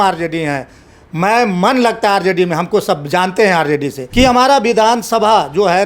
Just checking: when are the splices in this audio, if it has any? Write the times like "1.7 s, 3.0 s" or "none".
4.0 s